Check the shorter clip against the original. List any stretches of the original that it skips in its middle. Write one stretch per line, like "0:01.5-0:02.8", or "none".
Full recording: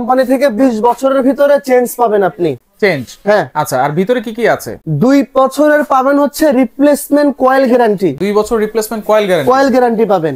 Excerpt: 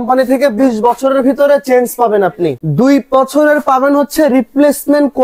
0:02.6-0:04.9